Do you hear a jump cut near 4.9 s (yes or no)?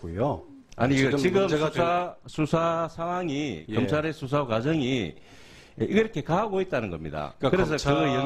no